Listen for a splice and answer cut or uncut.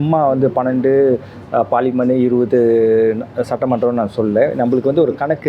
uncut